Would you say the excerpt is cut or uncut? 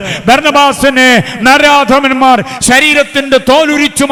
uncut